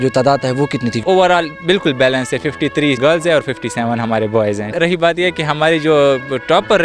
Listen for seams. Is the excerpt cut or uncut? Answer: cut